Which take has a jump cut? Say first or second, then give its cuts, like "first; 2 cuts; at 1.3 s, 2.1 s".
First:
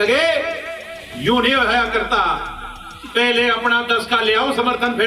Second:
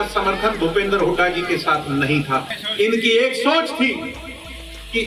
second; 1 cut; at 2.5 s